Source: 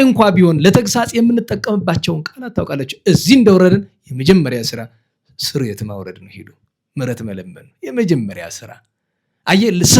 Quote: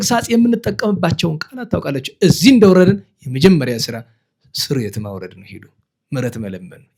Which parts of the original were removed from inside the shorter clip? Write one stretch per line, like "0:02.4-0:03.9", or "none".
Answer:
none

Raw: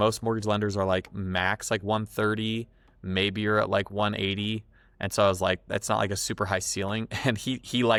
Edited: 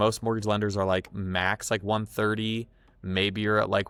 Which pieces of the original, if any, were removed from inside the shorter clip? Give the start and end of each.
none

